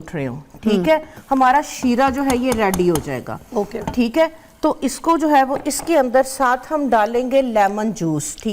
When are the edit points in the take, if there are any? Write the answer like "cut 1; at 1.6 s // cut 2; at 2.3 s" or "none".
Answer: cut 1; at 1.1 s